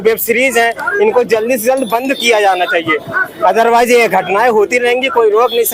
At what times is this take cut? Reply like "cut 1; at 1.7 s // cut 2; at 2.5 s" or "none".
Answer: none

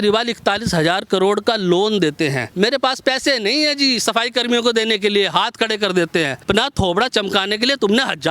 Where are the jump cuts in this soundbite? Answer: cut 1; at 2.5 s // cut 2; at 6.4 s

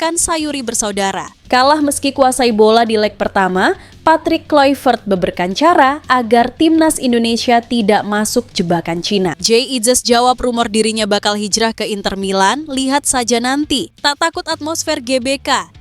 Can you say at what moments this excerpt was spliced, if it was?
cut 1; at 1.3 s // cut 2; at 9.4 s // cut 3; at 13.9 s

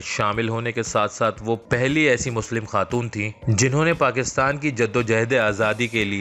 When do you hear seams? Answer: none

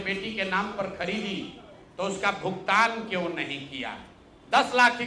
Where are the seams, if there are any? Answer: none

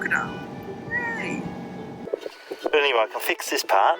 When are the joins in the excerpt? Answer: cut 1; at 2.0 s

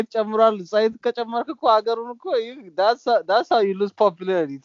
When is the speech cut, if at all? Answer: none

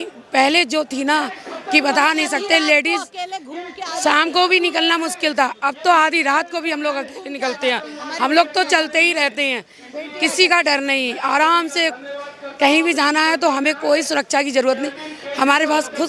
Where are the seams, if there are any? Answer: none

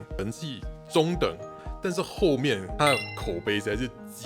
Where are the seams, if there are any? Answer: cut 1; at 2.7 s

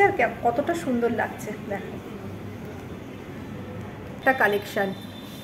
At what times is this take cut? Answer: cut 1; at 4.2 s

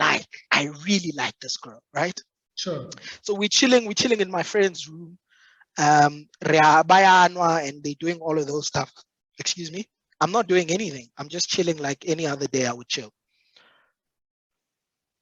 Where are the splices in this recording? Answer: none

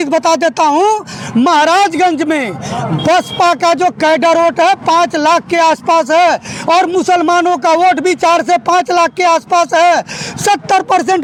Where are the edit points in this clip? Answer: none

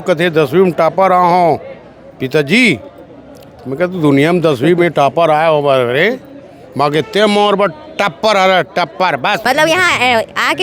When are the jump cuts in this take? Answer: cut 1; at 9.4 s

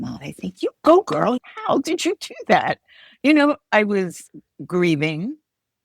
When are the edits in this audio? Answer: cut 1; at 1.4 s

